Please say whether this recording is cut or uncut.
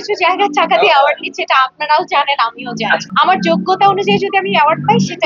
cut